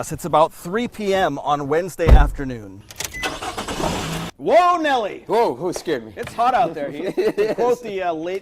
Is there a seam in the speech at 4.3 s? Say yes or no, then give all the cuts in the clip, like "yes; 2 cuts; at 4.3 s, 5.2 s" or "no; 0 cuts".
yes; 1 cut; at 4.3 s